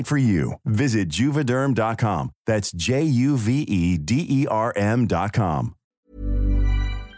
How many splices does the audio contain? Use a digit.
1